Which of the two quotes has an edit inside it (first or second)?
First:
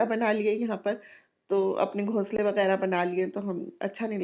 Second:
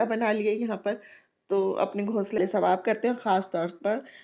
second